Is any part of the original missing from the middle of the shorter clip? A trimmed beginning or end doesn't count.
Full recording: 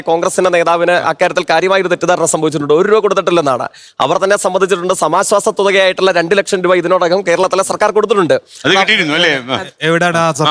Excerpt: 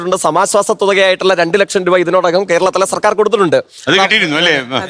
no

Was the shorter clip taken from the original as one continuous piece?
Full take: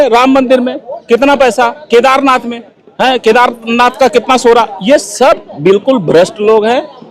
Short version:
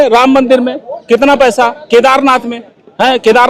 yes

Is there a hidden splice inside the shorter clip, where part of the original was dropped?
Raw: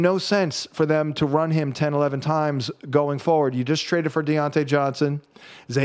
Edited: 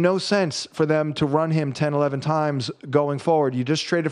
no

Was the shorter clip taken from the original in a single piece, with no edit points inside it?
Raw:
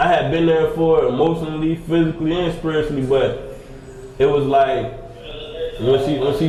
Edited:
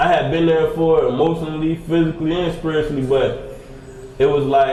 yes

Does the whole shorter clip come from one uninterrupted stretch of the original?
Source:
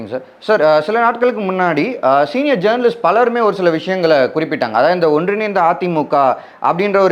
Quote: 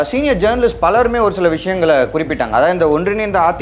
yes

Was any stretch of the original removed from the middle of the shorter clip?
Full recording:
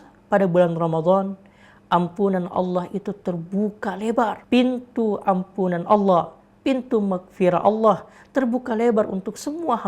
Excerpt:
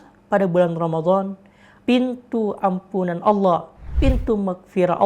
yes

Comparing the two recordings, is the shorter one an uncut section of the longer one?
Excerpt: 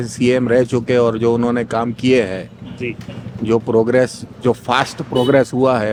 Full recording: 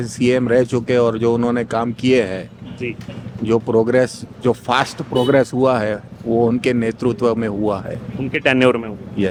yes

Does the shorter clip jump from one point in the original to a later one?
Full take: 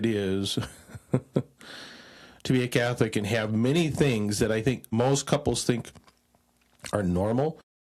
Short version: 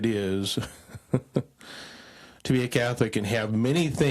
no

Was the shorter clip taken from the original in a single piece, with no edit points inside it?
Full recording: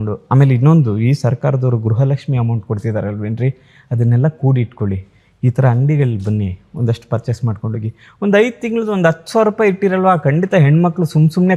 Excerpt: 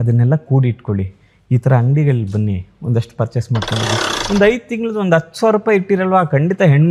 yes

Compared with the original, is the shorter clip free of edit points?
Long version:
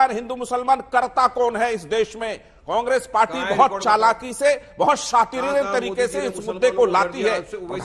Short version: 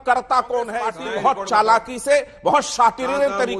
no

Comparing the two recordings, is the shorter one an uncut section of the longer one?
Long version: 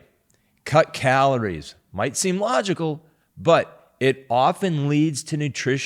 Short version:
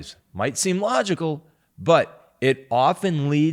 yes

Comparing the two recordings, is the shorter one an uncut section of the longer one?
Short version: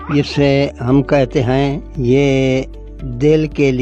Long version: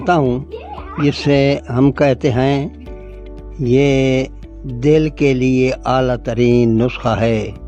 no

